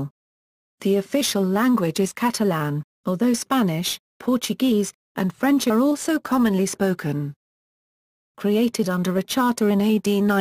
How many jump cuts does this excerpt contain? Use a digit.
1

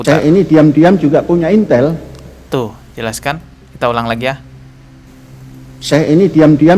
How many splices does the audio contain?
0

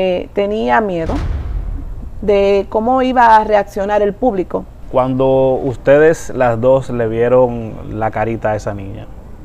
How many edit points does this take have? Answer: 1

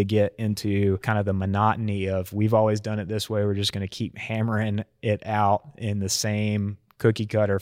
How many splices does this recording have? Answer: 1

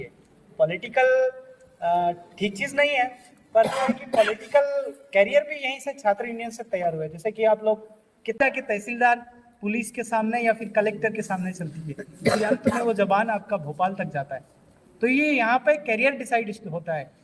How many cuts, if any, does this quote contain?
1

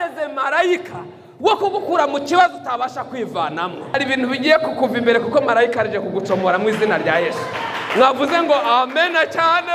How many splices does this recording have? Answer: 1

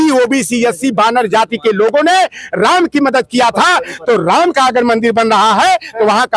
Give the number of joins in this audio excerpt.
0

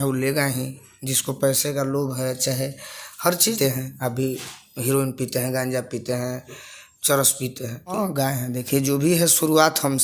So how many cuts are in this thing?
2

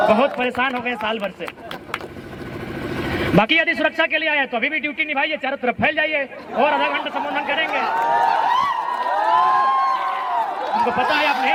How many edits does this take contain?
0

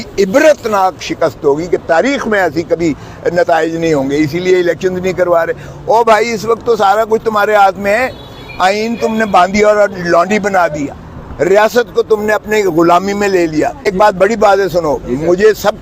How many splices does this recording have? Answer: 1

